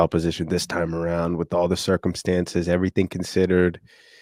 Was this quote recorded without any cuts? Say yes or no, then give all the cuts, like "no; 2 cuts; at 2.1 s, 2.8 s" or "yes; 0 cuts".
yes; 0 cuts